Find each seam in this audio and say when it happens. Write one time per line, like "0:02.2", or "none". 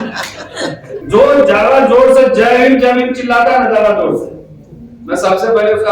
0:01.0